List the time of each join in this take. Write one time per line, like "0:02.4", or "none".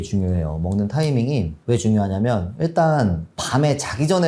none

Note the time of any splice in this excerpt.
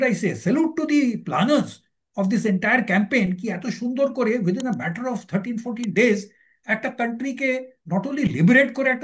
none

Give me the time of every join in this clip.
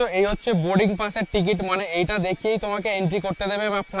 none

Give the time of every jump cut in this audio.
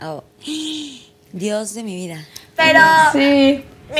none

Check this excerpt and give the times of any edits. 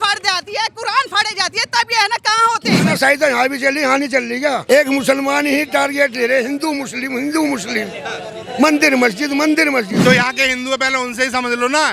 0:02.8
0:04.6
0:10.0

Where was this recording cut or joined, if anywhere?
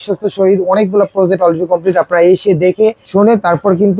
0:03.0

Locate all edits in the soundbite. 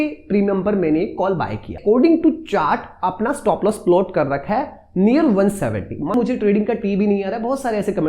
0:01.7
0:06.1

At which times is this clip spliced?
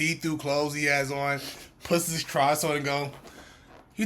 none

